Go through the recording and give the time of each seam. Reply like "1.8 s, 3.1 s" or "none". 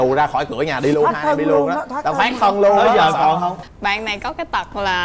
3.6 s